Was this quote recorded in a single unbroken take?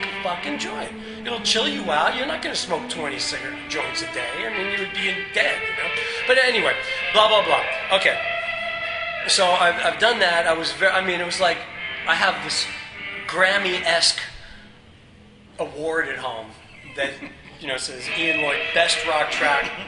no; 1 cut; at 4.9 s

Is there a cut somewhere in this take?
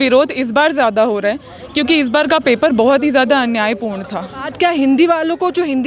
yes; 1 cut; at 4.5 s

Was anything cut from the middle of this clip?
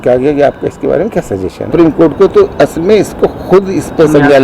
yes; 1 cut; at 1.6 s

